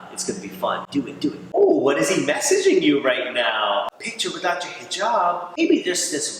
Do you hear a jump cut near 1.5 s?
yes; 3 cuts; at 1.5 s, 3.9 s, 5.6 s

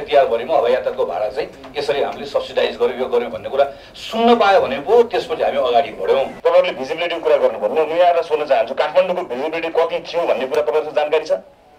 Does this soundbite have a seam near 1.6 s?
no; 1 cut; at 6.3 s

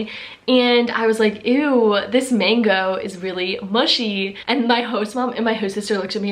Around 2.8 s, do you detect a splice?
no; 1 cut; at 4.4 s

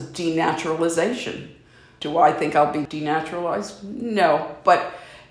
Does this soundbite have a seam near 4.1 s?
no; 2 cuts; at 1.9 s, 2.8 s

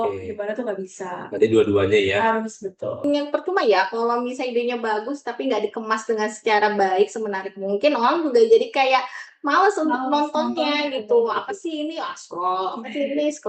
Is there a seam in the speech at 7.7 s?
no; 1 cut; at 3.0 s

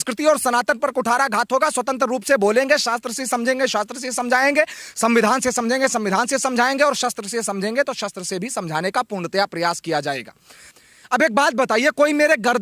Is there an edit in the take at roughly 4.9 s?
no; 1 cut; at 10.7 s

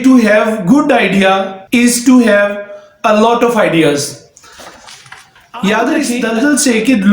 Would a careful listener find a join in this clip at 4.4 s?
no; 2 cuts; at 1.6 s, 6.2 s

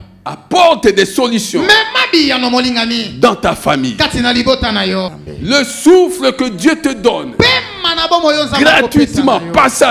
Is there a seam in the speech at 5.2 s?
yes; 1 cut; at 5.2 s

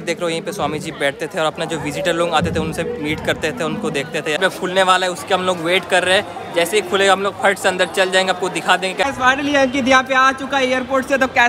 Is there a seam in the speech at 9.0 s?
yes; 2 cuts; at 4.4 s, 9.0 s

